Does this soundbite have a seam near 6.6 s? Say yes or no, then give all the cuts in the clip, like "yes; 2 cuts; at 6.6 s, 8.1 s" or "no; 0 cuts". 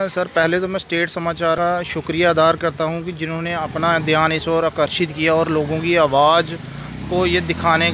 no; 1 cut; at 1.6 s